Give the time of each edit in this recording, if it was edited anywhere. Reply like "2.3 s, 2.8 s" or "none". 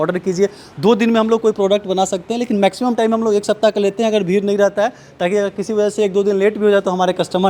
none